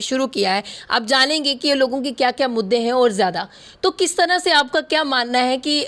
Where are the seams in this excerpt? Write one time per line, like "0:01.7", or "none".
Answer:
none